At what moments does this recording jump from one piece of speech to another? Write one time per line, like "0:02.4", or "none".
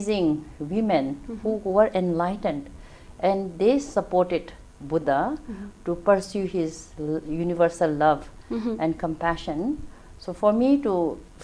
none